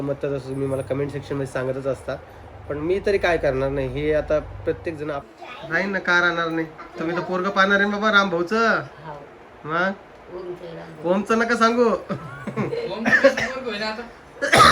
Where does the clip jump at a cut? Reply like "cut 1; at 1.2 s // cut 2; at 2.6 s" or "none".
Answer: cut 1; at 5.2 s